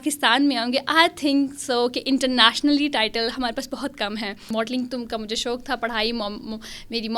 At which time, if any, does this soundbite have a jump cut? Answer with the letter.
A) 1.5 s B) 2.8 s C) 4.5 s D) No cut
C